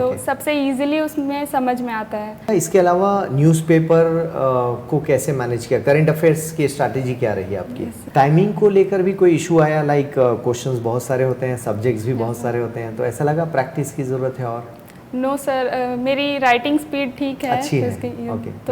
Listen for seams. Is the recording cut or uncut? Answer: cut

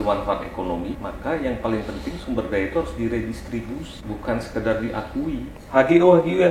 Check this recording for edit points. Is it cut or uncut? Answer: cut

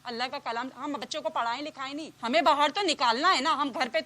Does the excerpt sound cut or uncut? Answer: cut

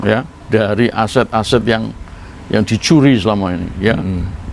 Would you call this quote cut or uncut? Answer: uncut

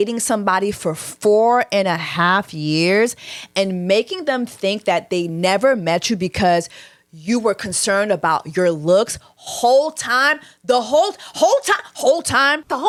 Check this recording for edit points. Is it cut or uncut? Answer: uncut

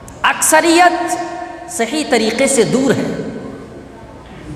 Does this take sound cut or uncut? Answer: uncut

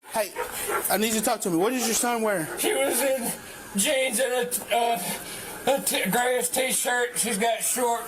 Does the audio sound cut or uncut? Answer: uncut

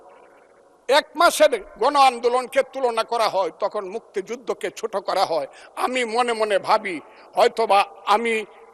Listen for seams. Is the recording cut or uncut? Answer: uncut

